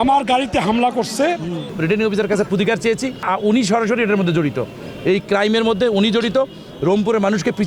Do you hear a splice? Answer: yes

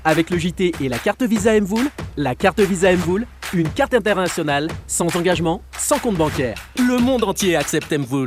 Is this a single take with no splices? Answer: yes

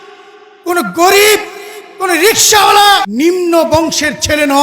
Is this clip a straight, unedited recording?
no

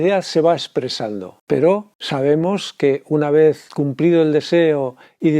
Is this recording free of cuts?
no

